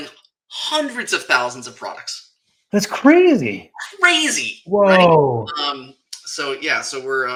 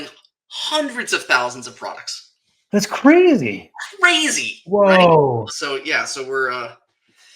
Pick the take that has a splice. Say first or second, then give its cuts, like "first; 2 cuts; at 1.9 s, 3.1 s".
second; 1 cut; at 5.5 s